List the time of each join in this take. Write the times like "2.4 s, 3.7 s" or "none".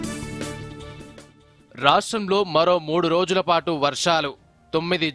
none